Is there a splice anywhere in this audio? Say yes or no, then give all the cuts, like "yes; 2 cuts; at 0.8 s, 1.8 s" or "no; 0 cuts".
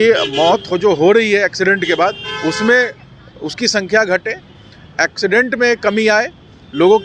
no; 0 cuts